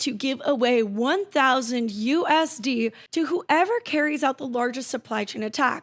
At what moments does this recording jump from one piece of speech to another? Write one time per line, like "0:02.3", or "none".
0:03.0